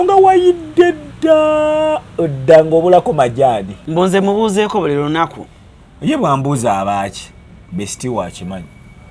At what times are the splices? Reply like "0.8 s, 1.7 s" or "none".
3.8 s